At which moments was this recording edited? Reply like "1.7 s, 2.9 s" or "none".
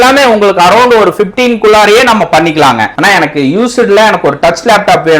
2.9 s